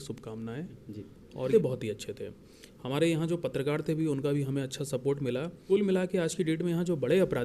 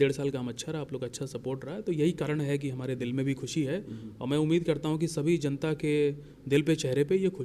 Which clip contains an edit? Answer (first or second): first